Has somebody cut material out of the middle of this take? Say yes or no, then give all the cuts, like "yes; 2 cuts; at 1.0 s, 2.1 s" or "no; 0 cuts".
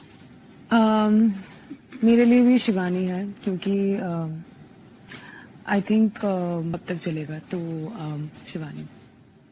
yes; 1 cut; at 6.7 s